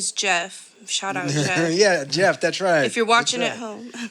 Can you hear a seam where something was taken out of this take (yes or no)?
no